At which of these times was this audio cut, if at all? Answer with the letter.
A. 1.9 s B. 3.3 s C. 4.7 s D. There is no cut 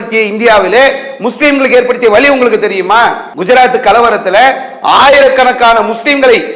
B